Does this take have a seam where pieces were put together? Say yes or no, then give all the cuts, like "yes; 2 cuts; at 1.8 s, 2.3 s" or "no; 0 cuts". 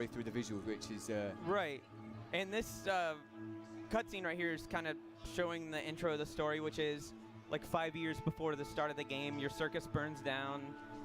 yes; 1 cut; at 7.7 s